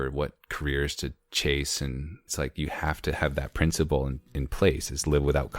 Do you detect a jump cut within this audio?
yes; 1 cut; at 2.3 s

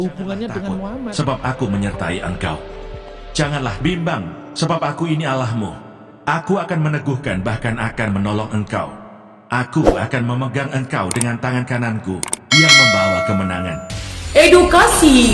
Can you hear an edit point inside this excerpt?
yes; 1 cut; at 1.1 s

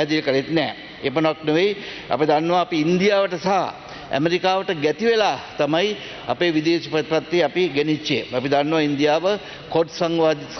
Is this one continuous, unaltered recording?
yes; 0 cuts

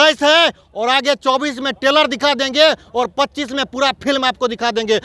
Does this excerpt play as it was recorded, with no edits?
yes; 0 cuts

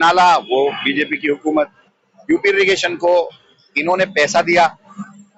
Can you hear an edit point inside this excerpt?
no; 0 cuts

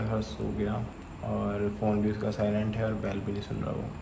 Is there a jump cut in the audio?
no; 0 cuts

